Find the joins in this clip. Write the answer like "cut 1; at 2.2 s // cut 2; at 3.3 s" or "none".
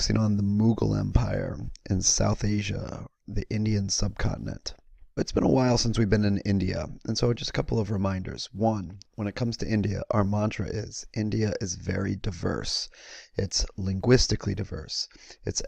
cut 1; at 13.3 s